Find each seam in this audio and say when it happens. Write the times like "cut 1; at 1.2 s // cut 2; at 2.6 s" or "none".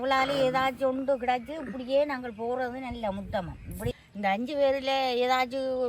cut 1; at 4.0 s

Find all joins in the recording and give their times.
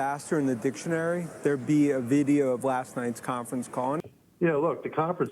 cut 1; at 4.0 s

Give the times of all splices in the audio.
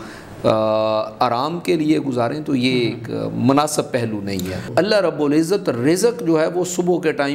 cut 1; at 4.7 s

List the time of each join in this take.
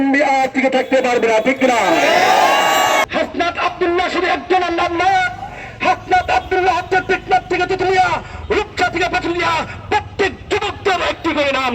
cut 1; at 3.0 s

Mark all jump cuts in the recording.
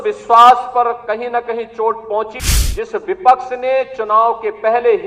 cut 1; at 2.4 s

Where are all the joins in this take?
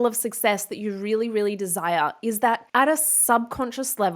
cut 1; at 2.7 s

